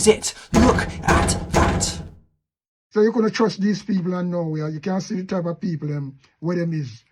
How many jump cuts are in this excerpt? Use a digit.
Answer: 1